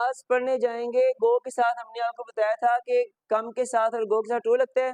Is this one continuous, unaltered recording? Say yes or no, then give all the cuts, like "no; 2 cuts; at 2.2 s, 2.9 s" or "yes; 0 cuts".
yes; 0 cuts